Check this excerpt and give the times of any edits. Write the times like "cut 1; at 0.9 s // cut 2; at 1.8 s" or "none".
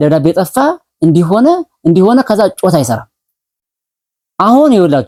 none